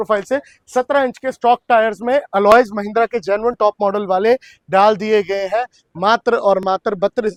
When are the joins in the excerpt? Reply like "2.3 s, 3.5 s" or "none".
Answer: none